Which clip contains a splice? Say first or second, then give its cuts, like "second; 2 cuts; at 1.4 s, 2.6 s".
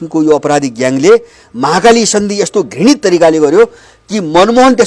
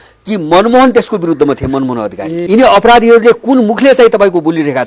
second; 1 cut; at 2.4 s